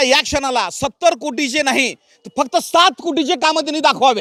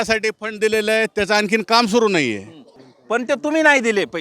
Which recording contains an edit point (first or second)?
second